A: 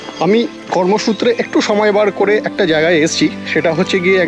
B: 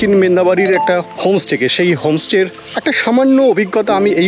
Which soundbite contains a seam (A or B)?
B